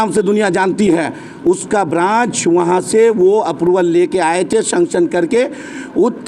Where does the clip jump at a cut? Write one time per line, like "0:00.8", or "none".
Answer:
none